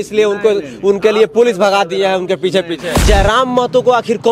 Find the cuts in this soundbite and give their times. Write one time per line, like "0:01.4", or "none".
0:03.0